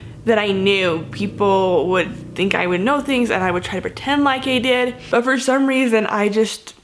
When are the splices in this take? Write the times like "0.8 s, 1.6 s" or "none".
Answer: 5.0 s